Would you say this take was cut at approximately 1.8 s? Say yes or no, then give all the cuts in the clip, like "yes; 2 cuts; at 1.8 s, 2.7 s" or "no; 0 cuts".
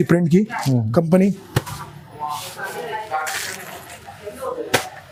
no; 0 cuts